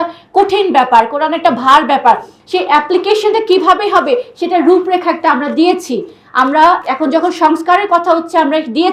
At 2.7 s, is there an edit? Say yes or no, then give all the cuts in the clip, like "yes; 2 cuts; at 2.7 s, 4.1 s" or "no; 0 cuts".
no; 1 cut; at 6.8 s